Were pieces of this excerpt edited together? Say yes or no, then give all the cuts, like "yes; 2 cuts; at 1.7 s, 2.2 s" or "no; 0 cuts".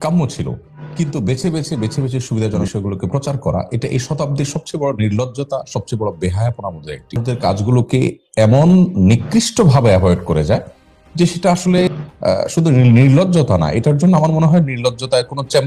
yes; 3 cuts; at 2.6 s, 7.2 s, 11.9 s